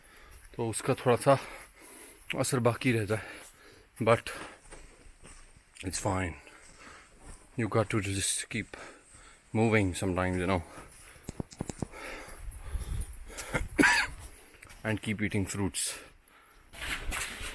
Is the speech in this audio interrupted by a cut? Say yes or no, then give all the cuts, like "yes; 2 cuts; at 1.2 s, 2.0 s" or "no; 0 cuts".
no; 0 cuts